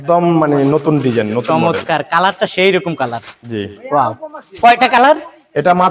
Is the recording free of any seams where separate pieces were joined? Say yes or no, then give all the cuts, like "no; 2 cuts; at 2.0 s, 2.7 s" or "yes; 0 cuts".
yes; 0 cuts